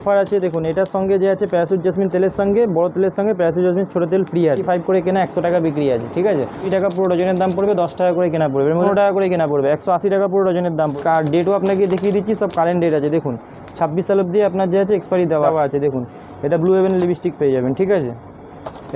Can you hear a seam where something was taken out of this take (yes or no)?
yes